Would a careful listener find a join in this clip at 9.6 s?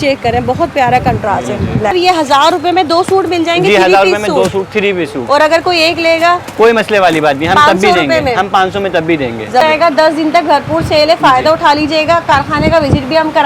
yes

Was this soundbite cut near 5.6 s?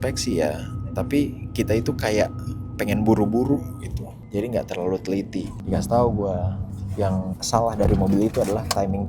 yes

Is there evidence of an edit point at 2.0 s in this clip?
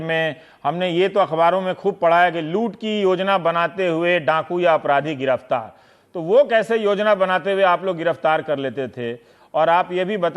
yes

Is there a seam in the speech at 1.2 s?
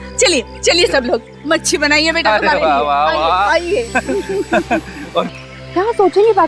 no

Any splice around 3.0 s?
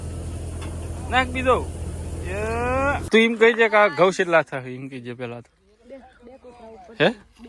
yes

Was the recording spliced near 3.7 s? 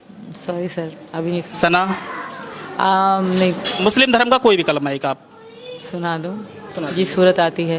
yes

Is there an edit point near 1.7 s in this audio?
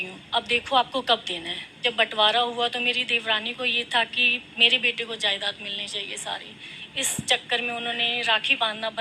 yes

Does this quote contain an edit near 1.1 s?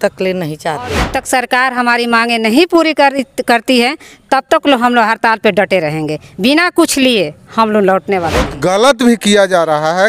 yes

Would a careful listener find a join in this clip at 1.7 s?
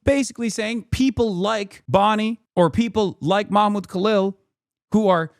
yes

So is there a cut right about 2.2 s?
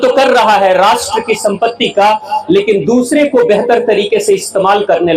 no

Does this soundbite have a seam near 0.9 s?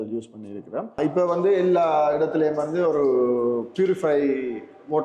yes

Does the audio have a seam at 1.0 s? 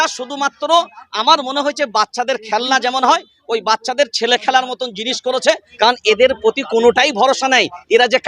no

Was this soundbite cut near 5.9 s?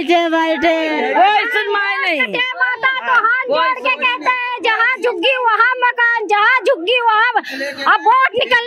no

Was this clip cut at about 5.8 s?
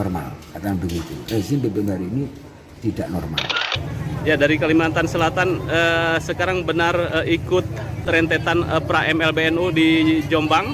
no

